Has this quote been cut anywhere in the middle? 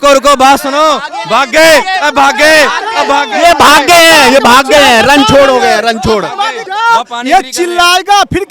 yes; 1 cut; at 6.6 s

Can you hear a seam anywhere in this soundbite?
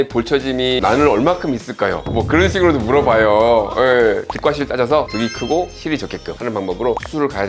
yes; 2 cuts; at 4.3 s, 6.3 s

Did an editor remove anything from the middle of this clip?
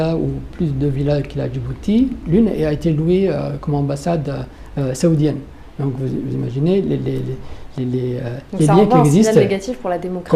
no; 0 cuts

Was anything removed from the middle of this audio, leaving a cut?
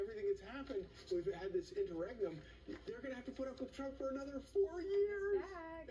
no; 0 cuts

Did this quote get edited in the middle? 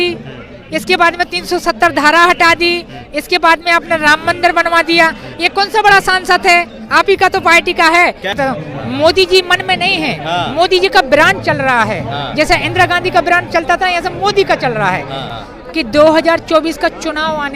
yes; 2 cuts; at 8.4 s, 15.3 s

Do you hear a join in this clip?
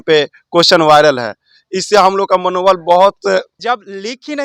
yes; 1 cut; at 3.5 s

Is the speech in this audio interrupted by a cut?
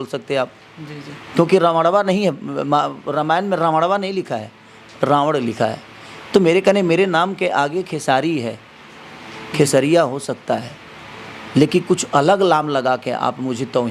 no; 0 cuts

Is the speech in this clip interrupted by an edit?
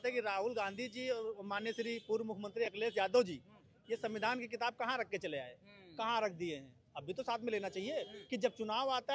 no; 0 cuts

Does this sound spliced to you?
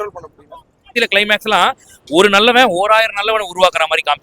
yes; 1 cut; at 0.9 s

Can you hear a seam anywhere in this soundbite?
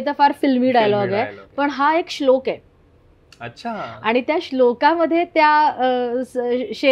no; 0 cuts

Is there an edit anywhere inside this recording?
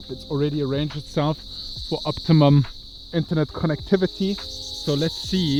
no; 0 cuts

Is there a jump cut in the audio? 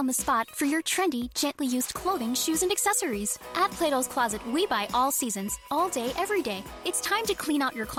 no; 0 cuts

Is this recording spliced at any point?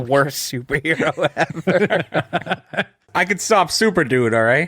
yes; 1 cut; at 3.1 s

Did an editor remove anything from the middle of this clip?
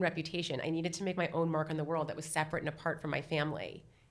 no; 0 cuts

